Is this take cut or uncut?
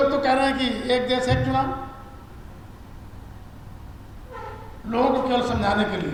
uncut